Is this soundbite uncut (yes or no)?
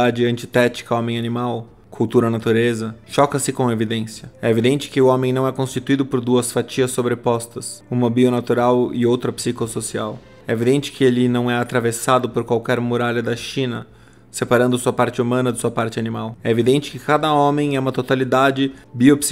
yes